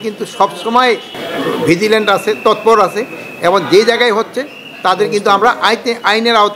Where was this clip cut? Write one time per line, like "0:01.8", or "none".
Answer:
none